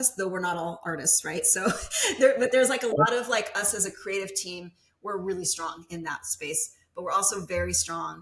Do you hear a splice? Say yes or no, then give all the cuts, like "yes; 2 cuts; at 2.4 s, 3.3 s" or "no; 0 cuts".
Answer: no; 0 cuts